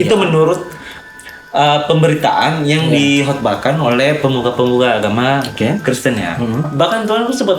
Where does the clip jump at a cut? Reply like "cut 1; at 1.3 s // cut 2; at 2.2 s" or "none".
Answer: cut 1; at 6.7 s